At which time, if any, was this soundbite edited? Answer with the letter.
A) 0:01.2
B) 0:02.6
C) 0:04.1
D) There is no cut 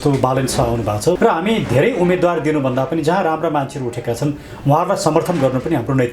A